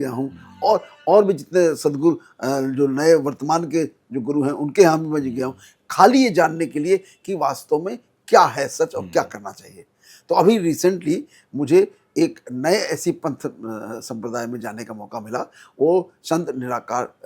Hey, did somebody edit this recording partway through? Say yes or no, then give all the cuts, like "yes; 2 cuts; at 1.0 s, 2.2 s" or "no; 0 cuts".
no; 0 cuts